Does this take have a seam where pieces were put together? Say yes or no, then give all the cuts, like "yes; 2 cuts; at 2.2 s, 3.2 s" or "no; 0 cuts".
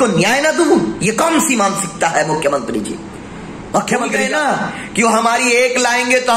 yes; 1 cut; at 4.2 s